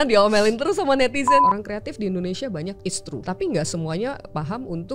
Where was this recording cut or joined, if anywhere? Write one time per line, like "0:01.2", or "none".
0:01.4
0:03.0